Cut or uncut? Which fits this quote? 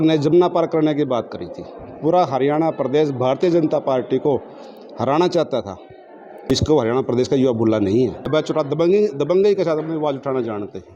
cut